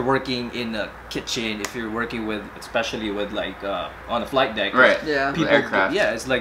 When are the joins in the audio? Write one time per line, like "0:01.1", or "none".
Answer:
none